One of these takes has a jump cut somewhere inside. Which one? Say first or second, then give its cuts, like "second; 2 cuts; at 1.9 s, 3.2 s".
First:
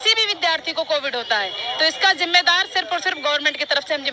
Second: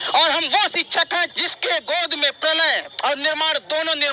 second; 2 cuts; at 1.4 s, 2.9 s